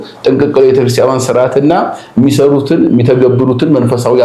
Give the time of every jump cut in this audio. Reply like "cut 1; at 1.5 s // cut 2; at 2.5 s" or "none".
none